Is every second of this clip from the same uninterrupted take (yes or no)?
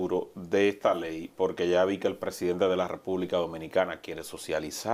yes